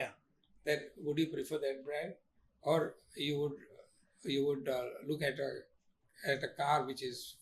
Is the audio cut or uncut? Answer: uncut